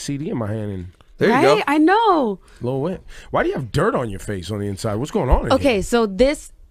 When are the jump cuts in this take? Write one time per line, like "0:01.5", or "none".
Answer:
0:01.9